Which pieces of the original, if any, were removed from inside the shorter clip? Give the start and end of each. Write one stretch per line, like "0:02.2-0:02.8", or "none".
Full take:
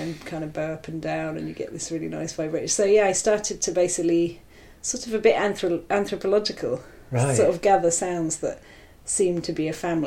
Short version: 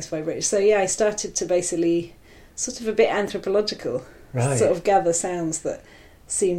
0:05.6-0:06.1